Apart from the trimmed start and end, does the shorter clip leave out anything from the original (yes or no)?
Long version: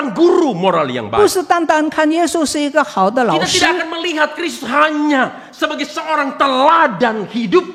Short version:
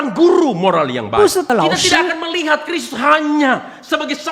yes